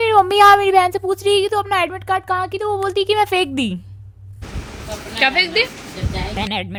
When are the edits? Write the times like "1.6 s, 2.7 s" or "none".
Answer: none